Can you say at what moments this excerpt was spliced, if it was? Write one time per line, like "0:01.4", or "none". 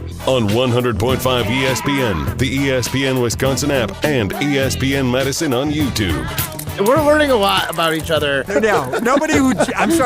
0:06.6